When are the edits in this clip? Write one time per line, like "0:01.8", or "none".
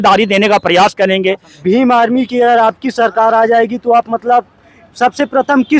0:01.5

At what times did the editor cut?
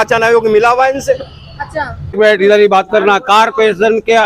0:02.1

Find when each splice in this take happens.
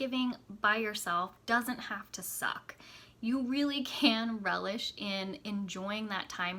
none

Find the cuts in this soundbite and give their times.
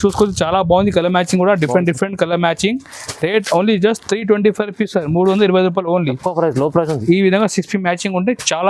none

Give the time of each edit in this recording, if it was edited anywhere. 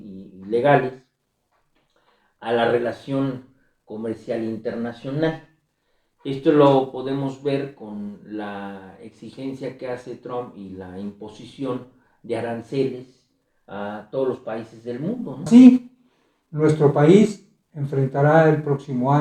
0:15.5

